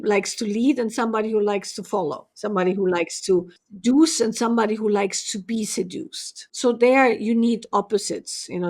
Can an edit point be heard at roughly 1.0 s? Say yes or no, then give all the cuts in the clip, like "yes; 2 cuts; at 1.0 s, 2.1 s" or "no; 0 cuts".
no; 3 cuts; at 2.3 s, 3.6 s, 6.5 s